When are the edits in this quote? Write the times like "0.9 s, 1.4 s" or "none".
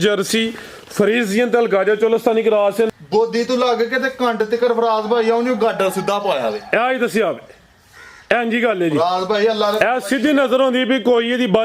2.9 s